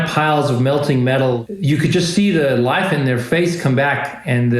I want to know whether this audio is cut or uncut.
cut